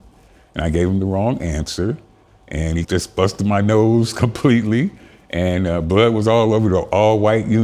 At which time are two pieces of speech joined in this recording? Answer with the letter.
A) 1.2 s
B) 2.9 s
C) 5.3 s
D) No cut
B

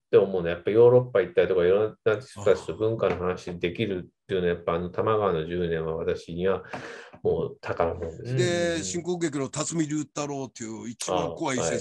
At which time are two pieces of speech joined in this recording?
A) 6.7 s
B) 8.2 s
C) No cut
B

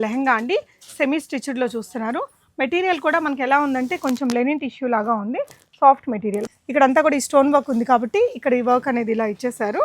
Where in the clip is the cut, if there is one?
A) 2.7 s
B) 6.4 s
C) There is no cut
B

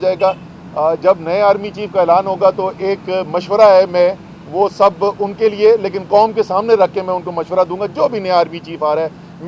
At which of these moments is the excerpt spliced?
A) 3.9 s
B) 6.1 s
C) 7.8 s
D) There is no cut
D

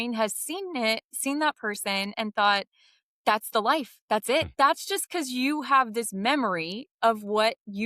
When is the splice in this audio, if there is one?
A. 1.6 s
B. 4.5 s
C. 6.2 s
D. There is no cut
B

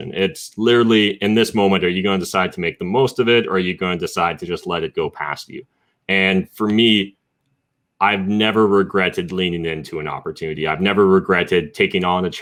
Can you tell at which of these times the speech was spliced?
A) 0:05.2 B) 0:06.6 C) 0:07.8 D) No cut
D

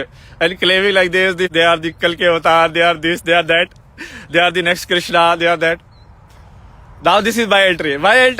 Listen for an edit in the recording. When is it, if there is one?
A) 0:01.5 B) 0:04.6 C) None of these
A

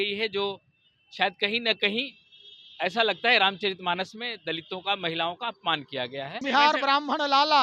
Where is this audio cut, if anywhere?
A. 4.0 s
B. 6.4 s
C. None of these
B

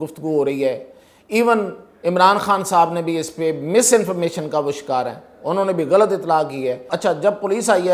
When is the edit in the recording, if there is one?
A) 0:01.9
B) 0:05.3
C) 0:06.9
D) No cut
C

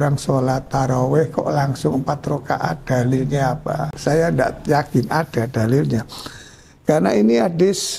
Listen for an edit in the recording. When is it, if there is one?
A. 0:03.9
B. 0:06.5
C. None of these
A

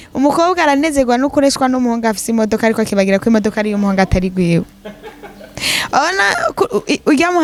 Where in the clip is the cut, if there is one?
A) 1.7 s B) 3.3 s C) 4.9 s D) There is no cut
D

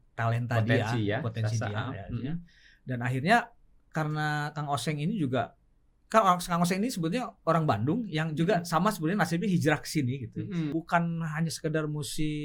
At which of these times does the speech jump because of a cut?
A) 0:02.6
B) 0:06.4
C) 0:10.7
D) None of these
C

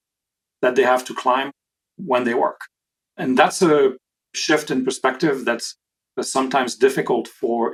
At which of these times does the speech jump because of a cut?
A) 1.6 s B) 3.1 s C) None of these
C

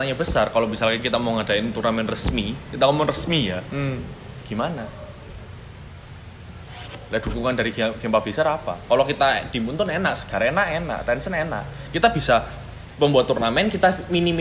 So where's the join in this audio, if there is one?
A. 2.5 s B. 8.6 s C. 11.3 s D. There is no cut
D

